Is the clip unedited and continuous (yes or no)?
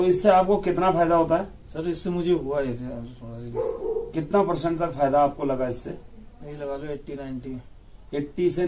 yes